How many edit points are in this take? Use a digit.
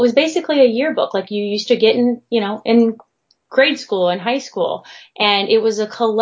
0